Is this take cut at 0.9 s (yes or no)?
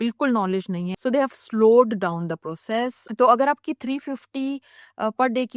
yes